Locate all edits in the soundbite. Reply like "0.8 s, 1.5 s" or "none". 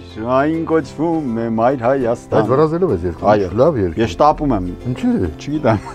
none

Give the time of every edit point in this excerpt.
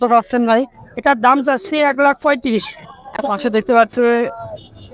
3.2 s

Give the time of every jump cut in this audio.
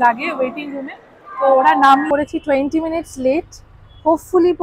2.1 s

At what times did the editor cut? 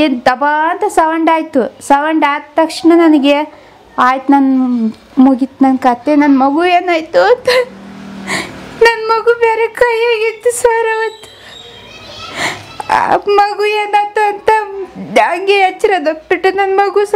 none

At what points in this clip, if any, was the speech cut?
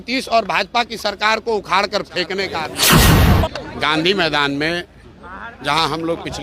2.6 s, 3.6 s

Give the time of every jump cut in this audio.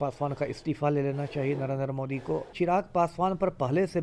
2.5 s

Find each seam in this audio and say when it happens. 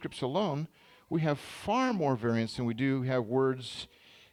none

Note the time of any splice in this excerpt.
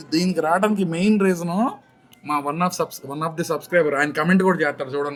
none

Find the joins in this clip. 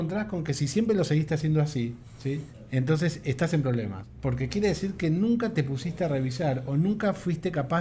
2.3 s, 4.0 s

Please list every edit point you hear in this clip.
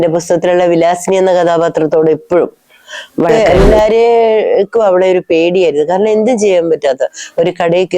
3.3 s

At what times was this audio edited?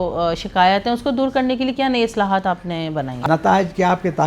3.2 s

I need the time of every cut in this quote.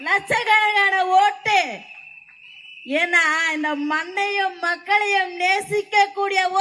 none

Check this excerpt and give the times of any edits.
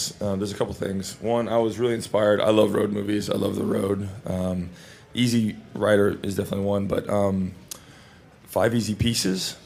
none

